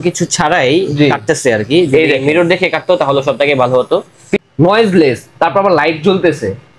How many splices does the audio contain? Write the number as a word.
one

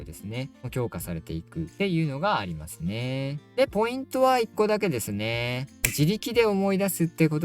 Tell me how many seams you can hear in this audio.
zero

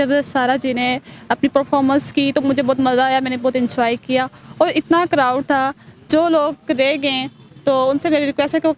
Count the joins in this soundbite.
zero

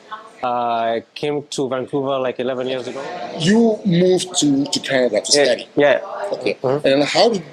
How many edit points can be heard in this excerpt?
one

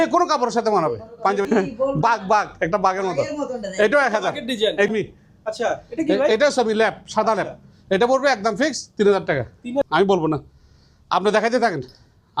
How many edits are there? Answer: three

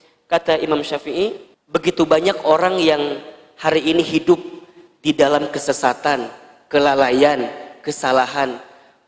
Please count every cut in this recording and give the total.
one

